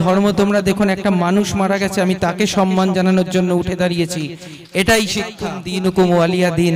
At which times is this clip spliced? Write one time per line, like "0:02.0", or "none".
0:05.6